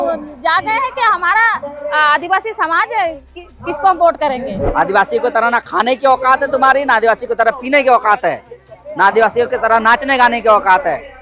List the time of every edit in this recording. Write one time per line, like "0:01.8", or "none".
0:04.7